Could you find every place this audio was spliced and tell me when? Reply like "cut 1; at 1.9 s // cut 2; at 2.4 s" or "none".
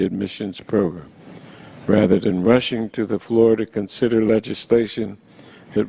cut 1; at 2.7 s